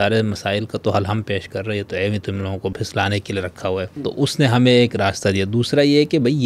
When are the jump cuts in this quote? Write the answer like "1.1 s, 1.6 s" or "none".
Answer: 2.7 s, 4.0 s